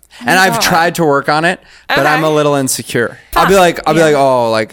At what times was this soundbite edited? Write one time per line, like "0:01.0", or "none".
0:03.3